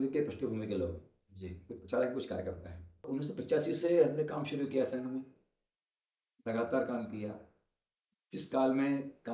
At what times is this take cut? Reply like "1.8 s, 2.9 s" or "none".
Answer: 3.0 s